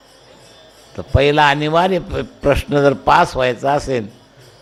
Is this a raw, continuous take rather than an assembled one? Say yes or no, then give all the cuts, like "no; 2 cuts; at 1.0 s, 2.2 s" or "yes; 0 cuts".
yes; 0 cuts